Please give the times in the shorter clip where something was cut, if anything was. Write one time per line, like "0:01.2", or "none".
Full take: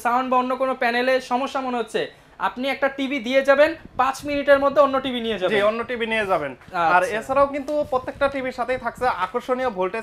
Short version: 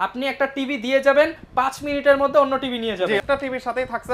0:03.2